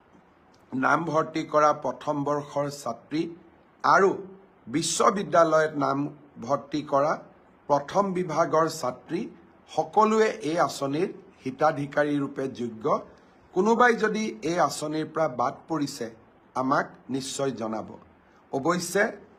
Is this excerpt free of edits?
yes; 0 cuts

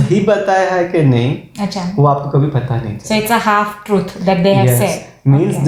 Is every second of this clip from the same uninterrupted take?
yes; 0 cuts

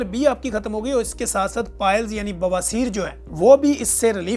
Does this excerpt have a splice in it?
yes; 1 cut; at 3.2 s

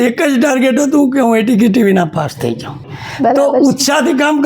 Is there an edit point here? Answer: yes; 1 cut; at 2.8 s

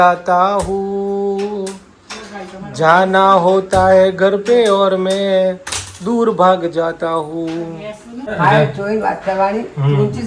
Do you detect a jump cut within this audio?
yes; 1 cut; at 8.3 s

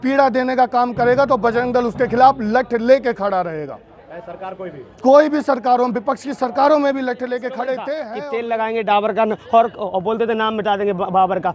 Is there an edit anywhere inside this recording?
yes; 1 cut; at 8.1 s

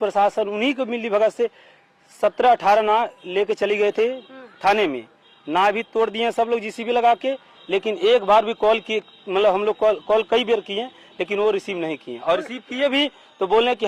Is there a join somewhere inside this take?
no; 0 cuts

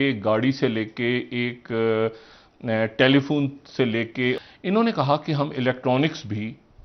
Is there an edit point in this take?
yes; 1 cut; at 4.4 s

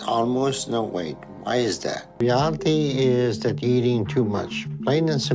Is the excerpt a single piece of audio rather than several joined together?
yes; 0 cuts

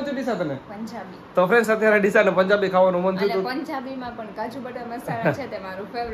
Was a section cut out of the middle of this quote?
no; 0 cuts

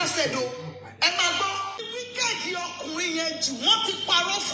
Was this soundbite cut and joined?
yes; 1 cut; at 1.9 s

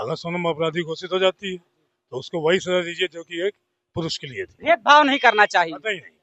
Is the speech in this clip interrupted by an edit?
no; 0 cuts

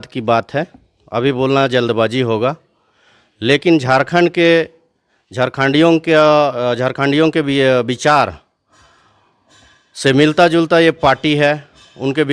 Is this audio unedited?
yes; 0 cuts

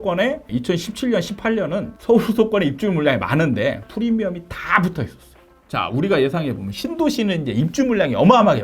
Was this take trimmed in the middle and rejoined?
yes; 1 cut; at 5.6 s

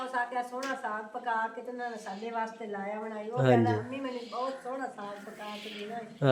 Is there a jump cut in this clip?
no; 0 cuts

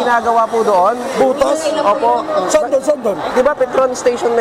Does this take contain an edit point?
no; 0 cuts

